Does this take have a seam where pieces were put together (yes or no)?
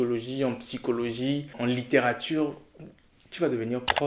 yes